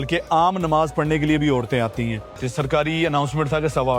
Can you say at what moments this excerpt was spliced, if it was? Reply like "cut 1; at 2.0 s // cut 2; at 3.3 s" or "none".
cut 1; at 2.4 s